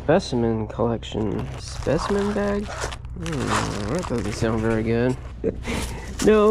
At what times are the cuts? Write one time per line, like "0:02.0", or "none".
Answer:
0:01.6
0:05.3